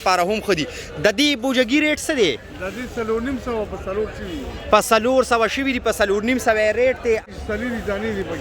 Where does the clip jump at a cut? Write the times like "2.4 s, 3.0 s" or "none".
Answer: 7.2 s